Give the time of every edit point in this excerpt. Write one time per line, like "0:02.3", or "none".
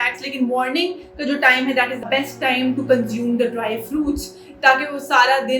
0:02.0